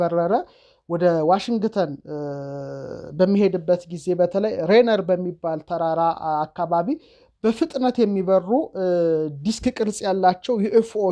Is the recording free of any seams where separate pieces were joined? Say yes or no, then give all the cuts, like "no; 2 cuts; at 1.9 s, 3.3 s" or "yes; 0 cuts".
yes; 0 cuts